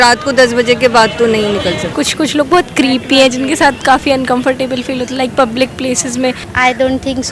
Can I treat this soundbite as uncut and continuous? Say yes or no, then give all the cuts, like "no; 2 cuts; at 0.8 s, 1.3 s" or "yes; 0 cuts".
no; 2 cuts; at 1.9 s, 6.5 s